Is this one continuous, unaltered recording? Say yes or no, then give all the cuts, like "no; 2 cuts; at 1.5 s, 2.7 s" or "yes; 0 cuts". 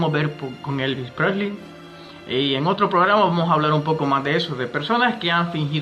no; 1 cut; at 3.4 s